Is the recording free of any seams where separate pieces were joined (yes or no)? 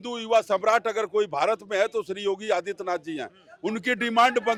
yes